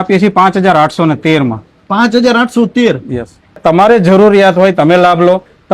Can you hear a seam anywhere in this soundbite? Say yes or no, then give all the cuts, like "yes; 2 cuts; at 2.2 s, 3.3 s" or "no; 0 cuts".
yes; 1 cut; at 3.6 s